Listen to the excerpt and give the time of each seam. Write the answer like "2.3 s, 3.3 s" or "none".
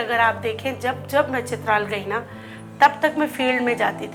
none